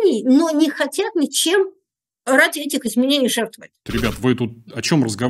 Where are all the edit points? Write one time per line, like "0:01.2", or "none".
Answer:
0:03.8